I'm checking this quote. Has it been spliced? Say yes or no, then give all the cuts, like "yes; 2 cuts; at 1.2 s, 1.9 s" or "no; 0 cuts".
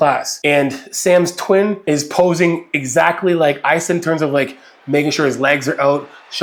no; 0 cuts